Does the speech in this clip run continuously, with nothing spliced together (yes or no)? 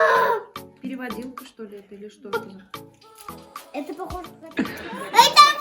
no